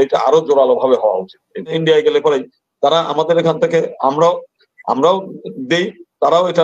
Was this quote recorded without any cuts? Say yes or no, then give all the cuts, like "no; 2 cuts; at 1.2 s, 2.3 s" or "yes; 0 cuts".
no; 1 cut; at 1.7 s